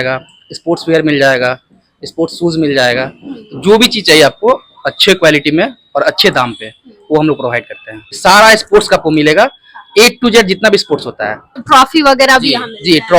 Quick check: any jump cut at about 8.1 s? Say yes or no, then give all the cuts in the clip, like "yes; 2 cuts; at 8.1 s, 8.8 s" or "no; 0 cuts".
yes; 2 cuts; at 8.1 s, 11.6 s